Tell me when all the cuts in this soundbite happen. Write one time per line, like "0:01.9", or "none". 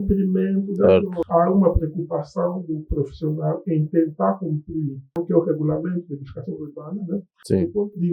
0:00.8
0:05.2